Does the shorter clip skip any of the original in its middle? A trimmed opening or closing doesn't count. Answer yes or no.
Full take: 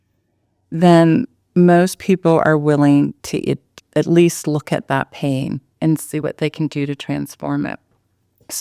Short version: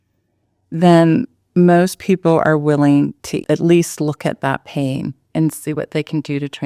yes